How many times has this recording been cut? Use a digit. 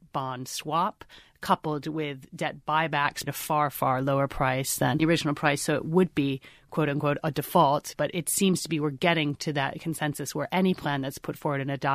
2